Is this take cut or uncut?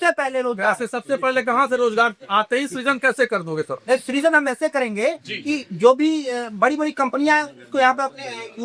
uncut